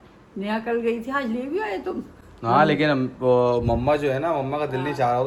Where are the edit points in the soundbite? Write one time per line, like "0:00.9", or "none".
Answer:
none